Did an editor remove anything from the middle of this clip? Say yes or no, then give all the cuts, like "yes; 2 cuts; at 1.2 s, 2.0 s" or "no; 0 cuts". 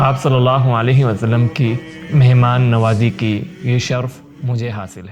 no; 0 cuts